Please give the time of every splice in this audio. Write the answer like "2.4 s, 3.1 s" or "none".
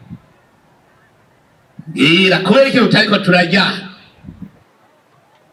none